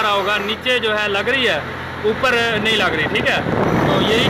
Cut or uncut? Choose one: uncut